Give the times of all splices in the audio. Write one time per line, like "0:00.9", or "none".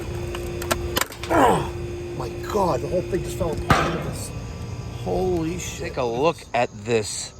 0:05.9